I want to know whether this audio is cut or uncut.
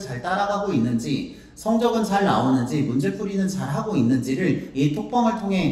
uncut